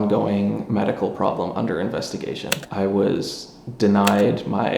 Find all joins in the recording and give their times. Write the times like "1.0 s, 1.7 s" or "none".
2.6 s